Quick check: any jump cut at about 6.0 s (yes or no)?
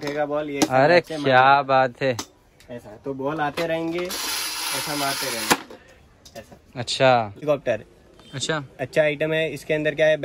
no